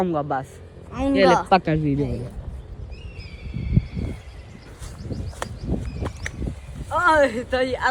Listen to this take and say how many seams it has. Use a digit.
0